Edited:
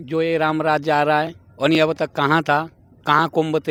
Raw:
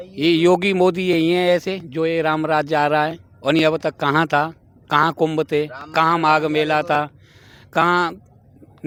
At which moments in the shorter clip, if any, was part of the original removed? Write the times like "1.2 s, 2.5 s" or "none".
none